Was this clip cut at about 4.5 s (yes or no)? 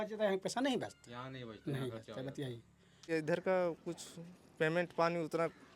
no